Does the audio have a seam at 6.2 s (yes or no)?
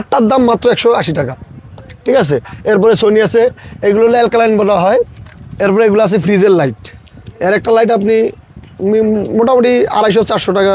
no